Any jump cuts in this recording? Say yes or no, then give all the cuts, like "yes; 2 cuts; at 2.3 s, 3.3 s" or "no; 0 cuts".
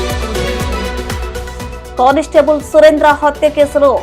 yes; 1 cut; at 1.0 s